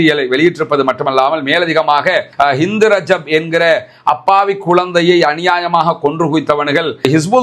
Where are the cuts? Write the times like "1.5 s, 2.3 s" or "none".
2.2 s